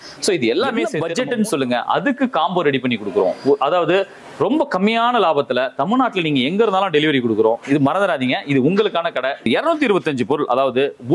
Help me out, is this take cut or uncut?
cut